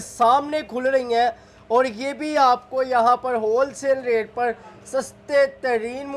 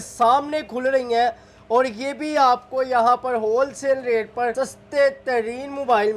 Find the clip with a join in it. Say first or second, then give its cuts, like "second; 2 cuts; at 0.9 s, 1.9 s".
second; 1 cut; at 4.5 s